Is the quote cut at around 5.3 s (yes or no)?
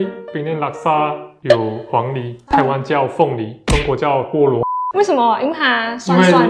no